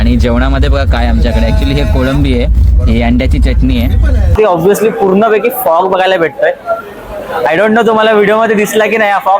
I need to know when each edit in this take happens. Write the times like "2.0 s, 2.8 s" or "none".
4.3 s